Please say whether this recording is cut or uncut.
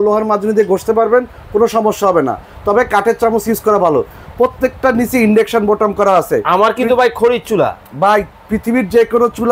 uncut